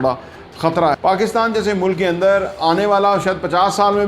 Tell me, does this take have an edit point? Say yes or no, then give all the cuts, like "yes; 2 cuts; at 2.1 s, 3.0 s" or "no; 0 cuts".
yes; 1 cut; at 1.0 s